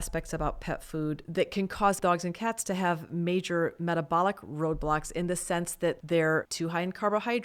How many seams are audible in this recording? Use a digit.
4